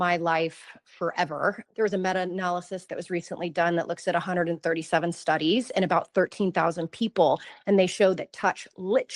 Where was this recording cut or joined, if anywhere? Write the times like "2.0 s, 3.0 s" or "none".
1.6 s, 2.8 s